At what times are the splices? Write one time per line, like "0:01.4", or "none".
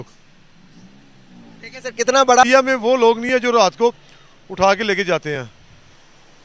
0:02.4